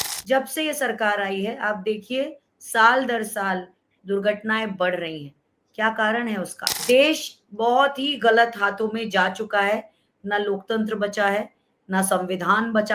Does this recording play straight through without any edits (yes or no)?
no